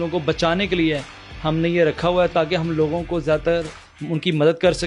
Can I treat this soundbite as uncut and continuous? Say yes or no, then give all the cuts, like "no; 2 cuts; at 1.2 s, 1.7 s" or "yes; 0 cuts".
yes; 0 cuts